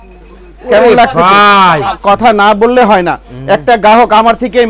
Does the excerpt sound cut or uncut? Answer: cut